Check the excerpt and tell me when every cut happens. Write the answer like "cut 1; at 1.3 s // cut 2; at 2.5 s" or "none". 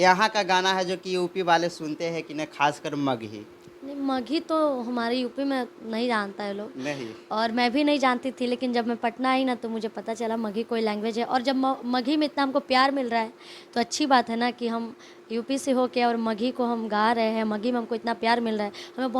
none